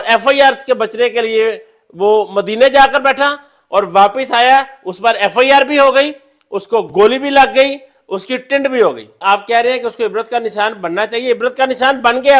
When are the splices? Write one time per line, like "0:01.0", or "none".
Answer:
0:09.2